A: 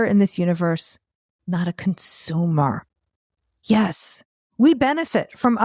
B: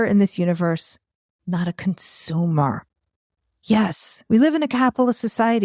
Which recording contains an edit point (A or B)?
A